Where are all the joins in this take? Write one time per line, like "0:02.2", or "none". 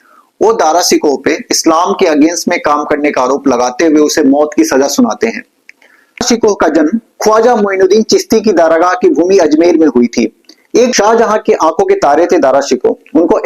0:06.3
0:10.9